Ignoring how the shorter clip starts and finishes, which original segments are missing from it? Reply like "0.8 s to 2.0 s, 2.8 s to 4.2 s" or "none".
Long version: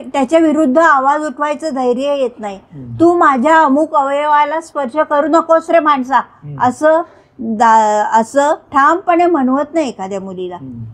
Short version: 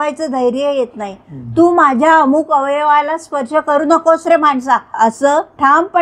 6.4 s to 8.1 s